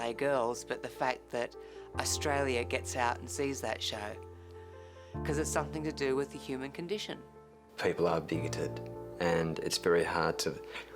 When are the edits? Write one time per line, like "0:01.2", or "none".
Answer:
0:04.5
0:07.2